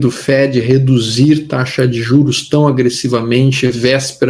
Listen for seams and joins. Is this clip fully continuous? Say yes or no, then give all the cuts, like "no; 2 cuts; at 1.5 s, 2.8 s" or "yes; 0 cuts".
yes; 0 cuts